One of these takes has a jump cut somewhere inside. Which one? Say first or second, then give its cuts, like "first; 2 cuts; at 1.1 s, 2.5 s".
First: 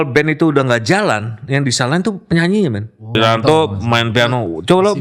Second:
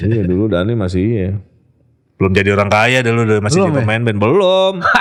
first; 1 cut; at 3.2 s